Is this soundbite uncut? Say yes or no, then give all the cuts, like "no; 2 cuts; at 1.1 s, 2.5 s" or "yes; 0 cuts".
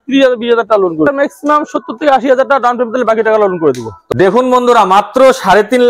no; 2 cuts; at 1.1 s, 3.9 s